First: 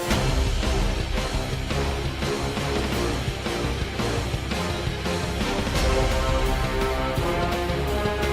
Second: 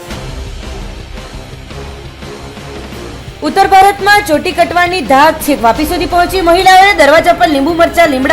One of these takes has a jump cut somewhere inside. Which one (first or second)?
second